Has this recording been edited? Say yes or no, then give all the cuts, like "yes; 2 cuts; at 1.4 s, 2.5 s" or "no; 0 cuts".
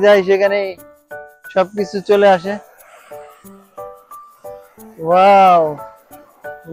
no; 0 cuts